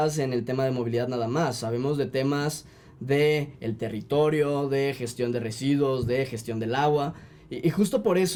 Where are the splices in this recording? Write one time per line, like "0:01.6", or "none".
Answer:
none

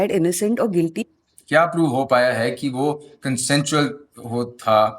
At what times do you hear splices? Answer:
0:01.0

